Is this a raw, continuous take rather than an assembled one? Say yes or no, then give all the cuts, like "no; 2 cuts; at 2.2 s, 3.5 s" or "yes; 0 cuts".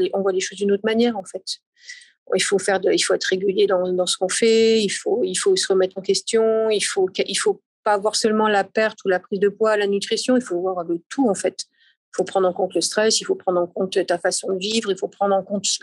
yes; 0 cuts